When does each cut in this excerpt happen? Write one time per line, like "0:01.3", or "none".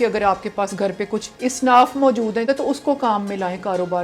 0:01.3
0:02.4

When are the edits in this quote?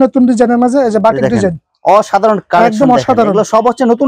none

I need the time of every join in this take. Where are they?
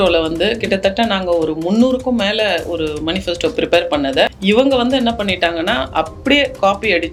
none

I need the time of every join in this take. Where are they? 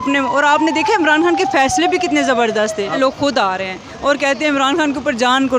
0:03.0

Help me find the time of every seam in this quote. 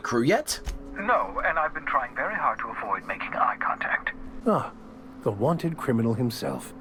none

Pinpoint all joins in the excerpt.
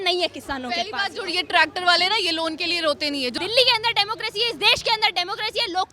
0:03.3

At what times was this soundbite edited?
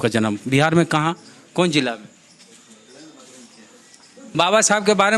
0:04.2

